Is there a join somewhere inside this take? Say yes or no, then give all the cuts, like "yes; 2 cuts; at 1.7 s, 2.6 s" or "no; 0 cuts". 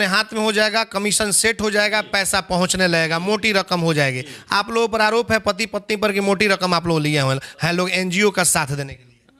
no; 0 cuts